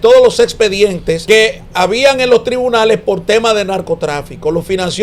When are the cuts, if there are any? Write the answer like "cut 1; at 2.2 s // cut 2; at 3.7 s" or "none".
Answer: cut 1; at 1.2 s